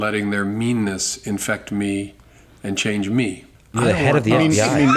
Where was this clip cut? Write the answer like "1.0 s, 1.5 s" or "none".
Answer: none